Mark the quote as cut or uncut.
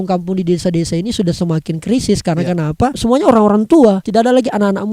cut